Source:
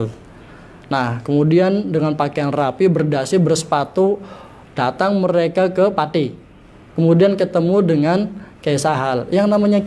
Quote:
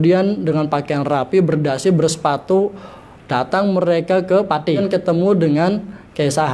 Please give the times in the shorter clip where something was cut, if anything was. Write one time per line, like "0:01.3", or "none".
0:04.8